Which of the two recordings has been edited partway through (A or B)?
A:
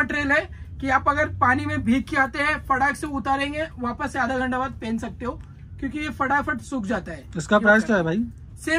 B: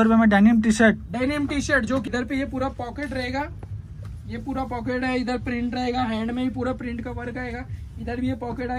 B